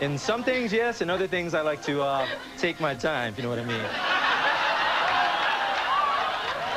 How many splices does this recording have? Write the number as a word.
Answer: zero